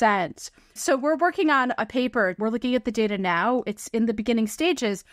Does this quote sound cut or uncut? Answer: cut